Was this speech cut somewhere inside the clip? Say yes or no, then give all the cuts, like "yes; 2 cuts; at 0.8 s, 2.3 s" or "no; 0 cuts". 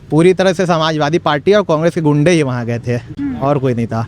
no; 0 cuts